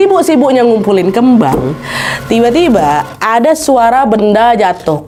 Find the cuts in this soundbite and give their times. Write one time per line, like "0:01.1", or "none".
none